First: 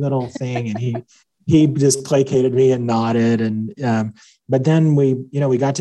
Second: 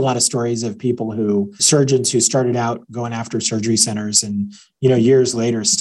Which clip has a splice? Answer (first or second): second